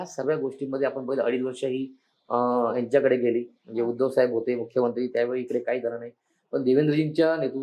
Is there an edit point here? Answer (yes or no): no